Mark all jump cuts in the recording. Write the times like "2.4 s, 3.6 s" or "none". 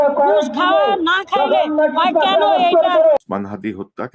3.2 s